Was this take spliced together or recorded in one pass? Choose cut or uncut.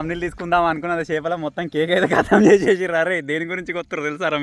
uncut